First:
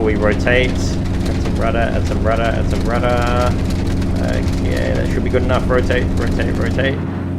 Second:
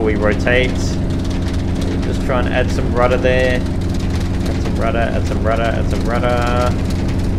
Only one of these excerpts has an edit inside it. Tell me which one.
first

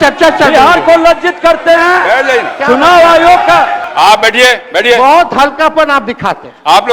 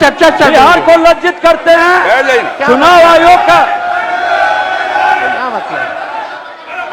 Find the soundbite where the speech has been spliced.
first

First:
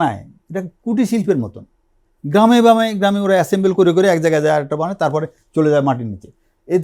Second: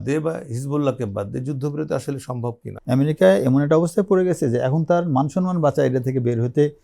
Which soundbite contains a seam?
second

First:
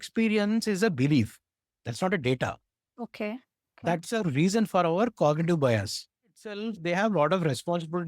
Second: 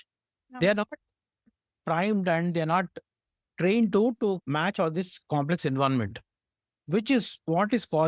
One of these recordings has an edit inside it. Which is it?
first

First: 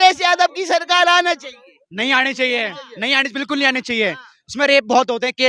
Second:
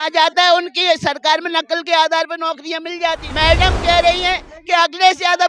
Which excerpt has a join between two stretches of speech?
second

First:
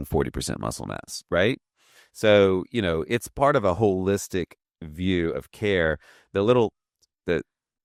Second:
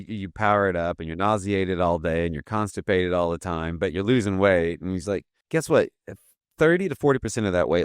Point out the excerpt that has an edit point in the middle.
second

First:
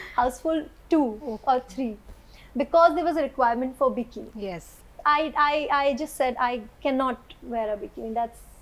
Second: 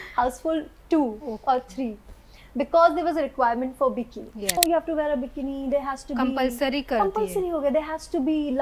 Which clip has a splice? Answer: second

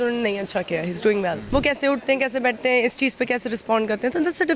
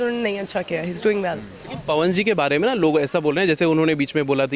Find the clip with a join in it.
first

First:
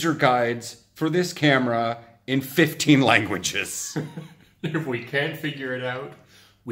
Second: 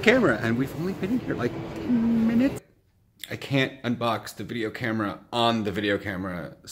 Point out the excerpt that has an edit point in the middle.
second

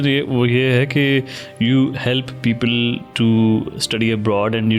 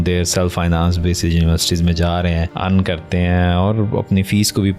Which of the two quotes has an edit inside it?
second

